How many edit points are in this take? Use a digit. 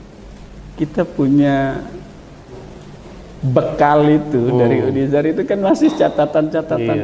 0